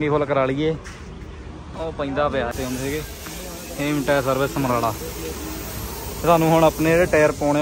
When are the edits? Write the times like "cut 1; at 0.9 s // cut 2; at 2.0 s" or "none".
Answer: cut 1; at 2.5 s